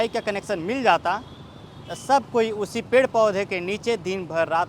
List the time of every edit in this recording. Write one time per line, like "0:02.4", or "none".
none

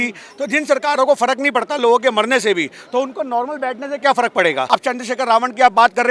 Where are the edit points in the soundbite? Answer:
0:04.6

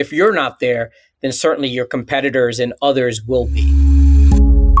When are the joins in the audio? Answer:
0:03.6

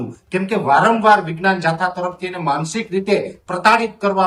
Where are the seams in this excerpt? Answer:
none

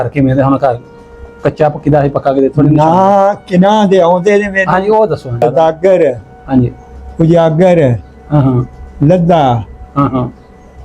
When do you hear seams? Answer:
0:05.4

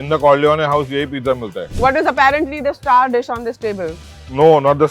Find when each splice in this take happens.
0:01.6

